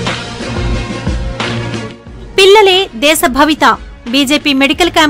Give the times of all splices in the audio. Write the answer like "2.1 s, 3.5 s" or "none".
1.7 s